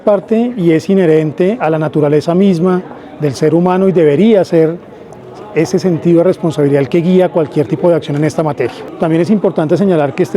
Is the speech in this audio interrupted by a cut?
yes; 1 cut; at 8.9 s

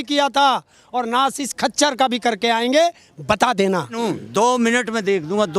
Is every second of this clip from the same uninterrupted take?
no; 1 cut; at 4.0 s

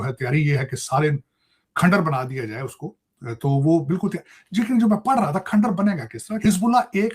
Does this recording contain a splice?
yes; 1 cut; at 6.2 s

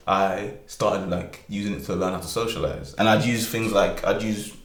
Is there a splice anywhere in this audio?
no; 0 cuts

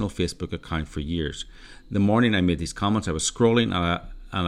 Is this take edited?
no; 0 cuts

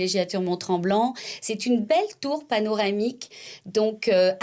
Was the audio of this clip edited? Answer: no; 0 cuts

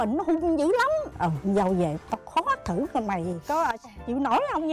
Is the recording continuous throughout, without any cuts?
no; 1 cut; at 1.1 s

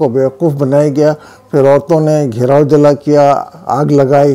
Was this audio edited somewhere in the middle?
no; 0 cuts

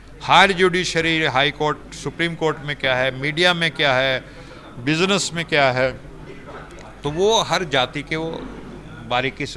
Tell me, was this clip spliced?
no; 0 cuts

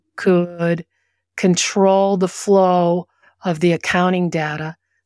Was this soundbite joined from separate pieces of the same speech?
no; 0 cuts

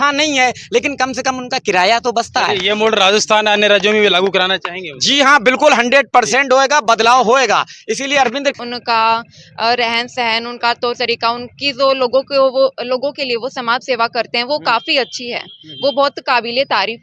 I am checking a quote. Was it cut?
yes; 1 cut; at 8.6 s

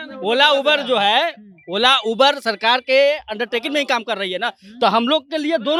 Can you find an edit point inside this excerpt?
no; 0 cuts

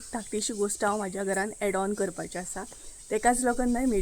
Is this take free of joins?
yes; 0 cuts

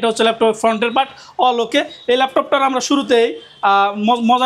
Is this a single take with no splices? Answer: yes; 0 cuts

